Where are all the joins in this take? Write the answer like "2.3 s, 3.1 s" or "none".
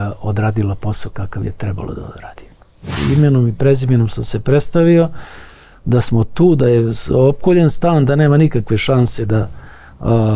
2.9 s